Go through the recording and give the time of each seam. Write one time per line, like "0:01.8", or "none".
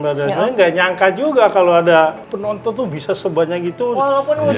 0:02.3